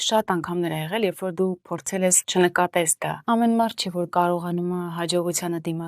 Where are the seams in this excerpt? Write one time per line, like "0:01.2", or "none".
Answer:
0:02.2
0:03.1